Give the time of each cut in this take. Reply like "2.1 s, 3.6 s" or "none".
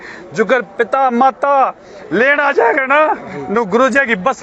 none